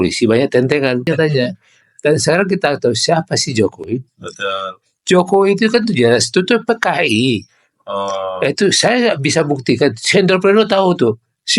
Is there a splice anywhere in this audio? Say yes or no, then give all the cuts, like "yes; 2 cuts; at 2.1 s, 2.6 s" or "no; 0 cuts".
yes; 1 cut; at 1.1 s